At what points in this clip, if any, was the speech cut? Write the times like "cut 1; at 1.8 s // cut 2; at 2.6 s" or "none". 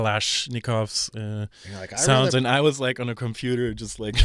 none